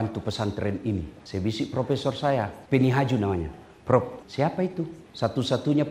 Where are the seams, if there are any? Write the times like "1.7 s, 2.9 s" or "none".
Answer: 1.2 s, 2.6 s, 4.7 s

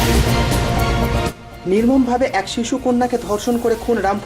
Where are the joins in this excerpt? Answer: 1.4 s

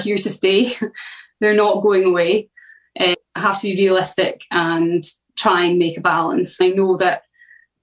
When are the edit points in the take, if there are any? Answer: 3.1 s, 5.2 s, 6.6 s

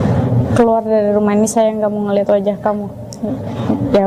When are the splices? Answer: none

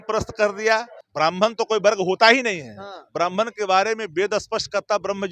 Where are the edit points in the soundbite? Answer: 1.0 s

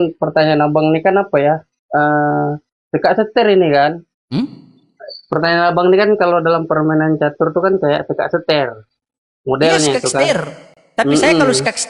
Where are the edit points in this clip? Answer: 4.1 s

